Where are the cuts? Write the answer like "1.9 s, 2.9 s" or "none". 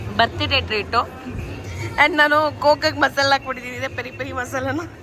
none